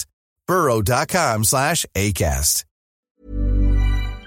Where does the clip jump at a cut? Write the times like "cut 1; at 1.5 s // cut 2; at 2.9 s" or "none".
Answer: cut 1; at 3.2 s